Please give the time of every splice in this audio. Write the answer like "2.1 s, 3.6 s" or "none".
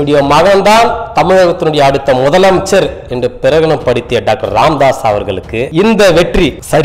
none